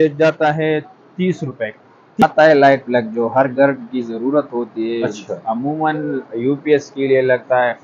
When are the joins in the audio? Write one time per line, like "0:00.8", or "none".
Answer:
0:02.2